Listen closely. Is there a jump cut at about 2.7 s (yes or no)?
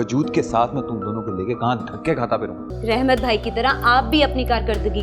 yes